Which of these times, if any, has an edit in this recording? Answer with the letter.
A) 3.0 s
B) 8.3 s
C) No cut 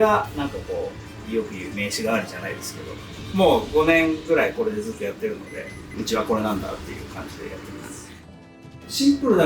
B